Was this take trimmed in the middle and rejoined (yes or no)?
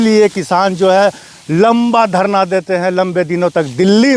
no